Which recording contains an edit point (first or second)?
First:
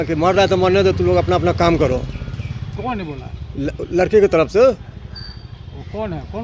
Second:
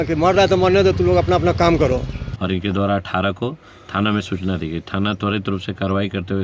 second